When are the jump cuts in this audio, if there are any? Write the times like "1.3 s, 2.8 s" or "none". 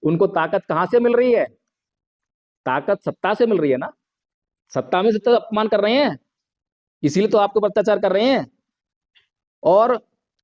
5.4 s

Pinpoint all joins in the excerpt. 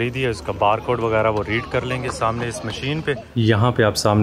3.3 s

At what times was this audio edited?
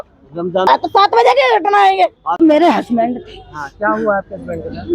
0.7 s, 2.2 s

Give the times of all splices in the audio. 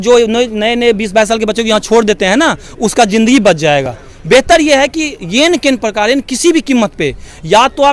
none

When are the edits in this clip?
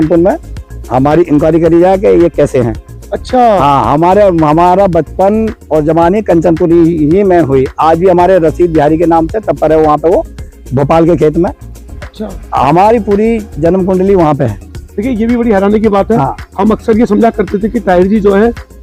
none

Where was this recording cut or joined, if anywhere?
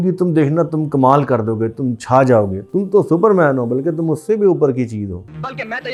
none

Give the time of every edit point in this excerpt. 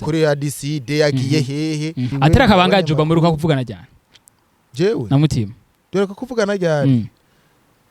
2.1 s

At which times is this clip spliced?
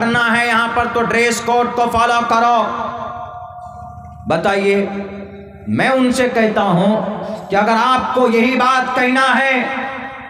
none

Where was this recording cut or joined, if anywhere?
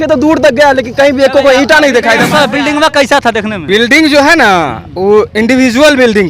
2.3 s

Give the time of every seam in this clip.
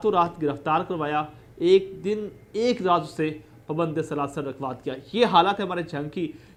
none

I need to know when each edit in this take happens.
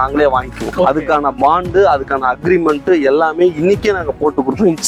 none

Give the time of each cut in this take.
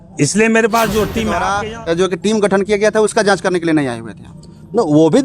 1.3 s

